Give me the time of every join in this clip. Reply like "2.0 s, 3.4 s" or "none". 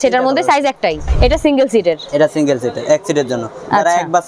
1.1 s